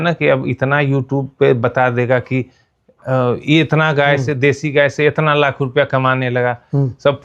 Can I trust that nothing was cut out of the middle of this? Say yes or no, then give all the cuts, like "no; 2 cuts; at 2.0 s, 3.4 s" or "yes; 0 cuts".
yes; 0 cuts